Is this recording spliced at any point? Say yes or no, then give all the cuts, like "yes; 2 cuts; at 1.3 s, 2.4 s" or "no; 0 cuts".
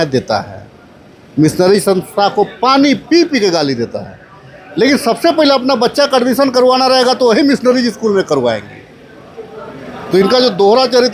no; 0 cuts